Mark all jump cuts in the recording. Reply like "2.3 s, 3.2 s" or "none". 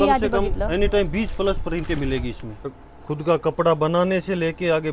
2.7 s